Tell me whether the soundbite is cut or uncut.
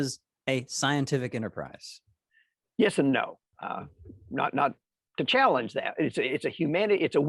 cut